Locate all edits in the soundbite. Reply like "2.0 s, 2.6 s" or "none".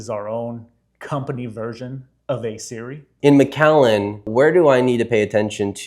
3.1 s, 4.3 s